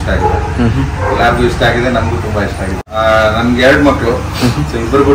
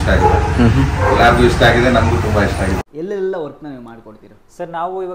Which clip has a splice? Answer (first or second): second